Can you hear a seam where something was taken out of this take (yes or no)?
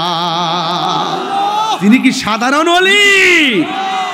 no